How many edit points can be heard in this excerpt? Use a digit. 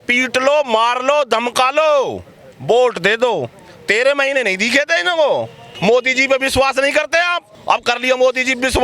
2